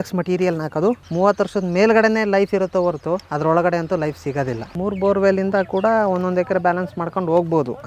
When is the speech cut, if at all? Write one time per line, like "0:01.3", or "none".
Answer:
0:01.0
0:04.6